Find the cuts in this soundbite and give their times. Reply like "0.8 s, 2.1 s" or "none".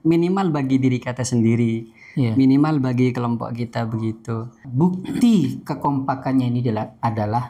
4.7 s